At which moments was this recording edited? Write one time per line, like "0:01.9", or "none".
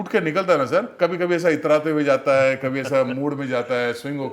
0:00.9